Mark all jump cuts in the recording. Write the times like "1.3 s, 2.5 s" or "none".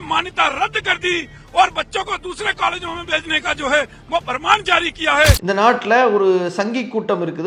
none